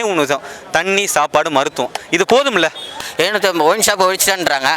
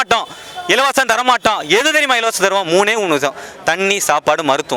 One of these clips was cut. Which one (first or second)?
first